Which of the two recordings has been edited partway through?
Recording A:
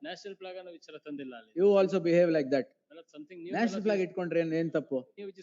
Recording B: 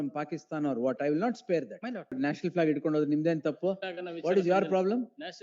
B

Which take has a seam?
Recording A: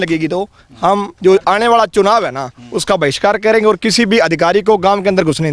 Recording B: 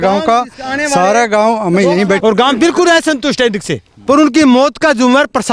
B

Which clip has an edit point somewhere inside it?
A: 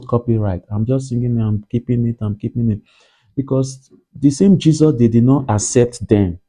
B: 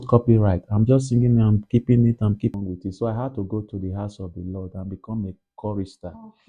B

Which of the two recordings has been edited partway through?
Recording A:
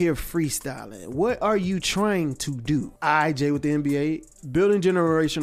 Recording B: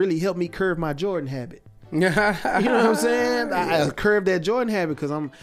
A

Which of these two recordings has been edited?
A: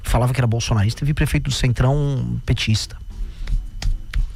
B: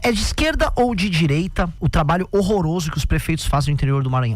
B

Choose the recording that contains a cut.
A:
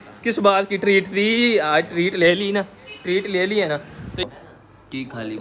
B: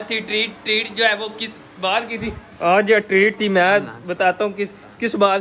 A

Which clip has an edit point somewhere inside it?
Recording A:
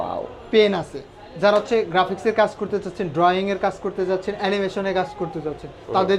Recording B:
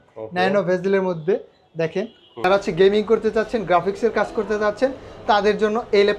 B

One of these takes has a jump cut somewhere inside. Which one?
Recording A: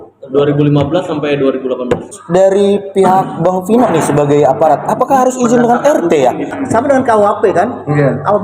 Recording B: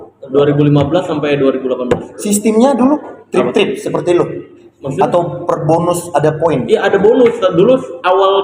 A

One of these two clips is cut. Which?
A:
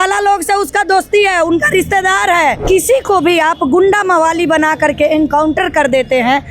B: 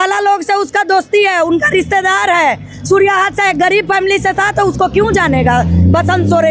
A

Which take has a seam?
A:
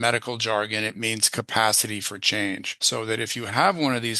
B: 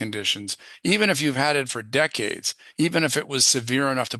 A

